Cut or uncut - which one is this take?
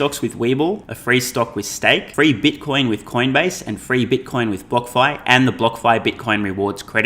cut